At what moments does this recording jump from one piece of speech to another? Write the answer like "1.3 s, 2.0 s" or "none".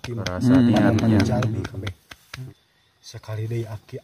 2.4 s